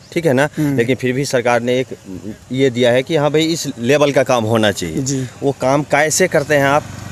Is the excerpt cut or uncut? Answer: uncut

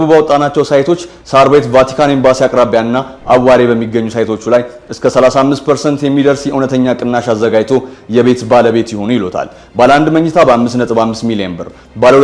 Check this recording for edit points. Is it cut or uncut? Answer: uncut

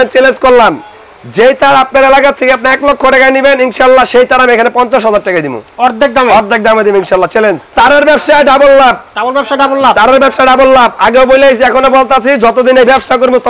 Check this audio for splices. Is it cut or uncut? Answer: cut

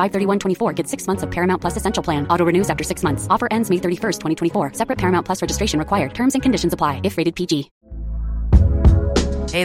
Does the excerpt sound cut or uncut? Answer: uncut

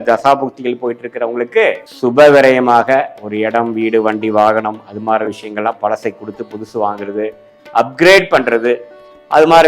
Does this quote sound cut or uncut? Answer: cut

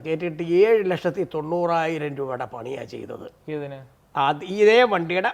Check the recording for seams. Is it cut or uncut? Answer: uncut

